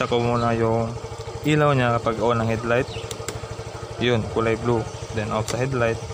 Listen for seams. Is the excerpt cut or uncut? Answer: uncut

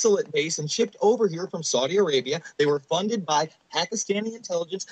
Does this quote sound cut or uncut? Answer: uncut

